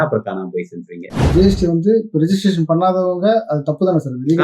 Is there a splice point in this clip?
yes; 1 cut; at 1.2 s

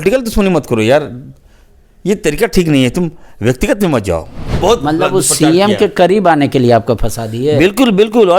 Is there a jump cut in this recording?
yes; 1 cut; at 4.4 s

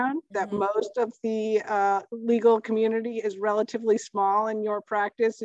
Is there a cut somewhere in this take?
no; 0 cuts

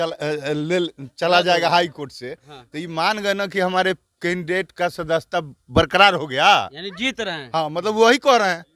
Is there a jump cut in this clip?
no; 0 cuts

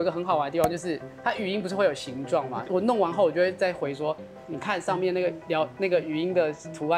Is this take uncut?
yes; 0 cuts

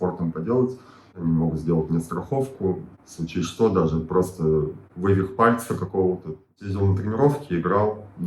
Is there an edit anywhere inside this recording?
yes; 2 cuts; at 1.1 s, 6.7 s

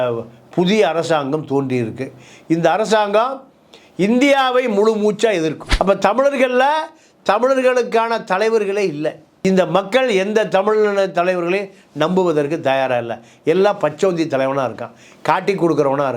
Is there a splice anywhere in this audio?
yes; 1 cut; at 5.7 s

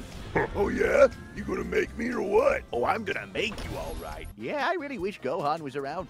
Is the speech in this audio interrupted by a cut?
yes; 1 cut; at 4.3 s

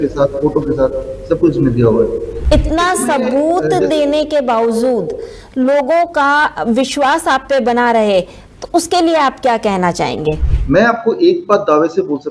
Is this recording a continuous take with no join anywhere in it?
no; 2 cuts; at 2.3 s, 10.5 s

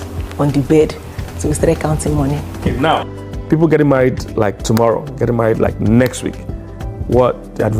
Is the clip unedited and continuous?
no; 1 cut; at 2.5 s

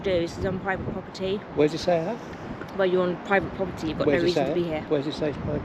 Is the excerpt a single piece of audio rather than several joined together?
yes; 0 cuts

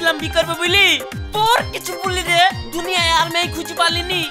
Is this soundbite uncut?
yes; 0 cuts

